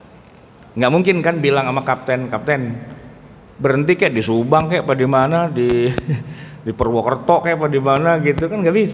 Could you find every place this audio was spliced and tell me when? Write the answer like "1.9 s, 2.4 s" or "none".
none